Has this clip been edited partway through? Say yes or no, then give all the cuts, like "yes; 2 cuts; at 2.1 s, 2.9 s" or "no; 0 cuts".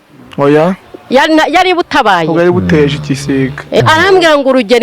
yes; 1 cut; at 3.8 s